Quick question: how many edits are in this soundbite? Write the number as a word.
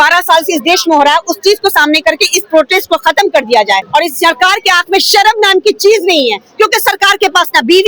one